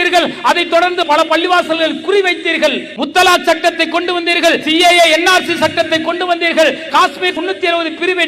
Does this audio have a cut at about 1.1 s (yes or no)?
yes